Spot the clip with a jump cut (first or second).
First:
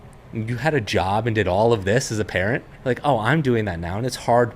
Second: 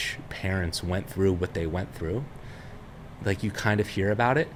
first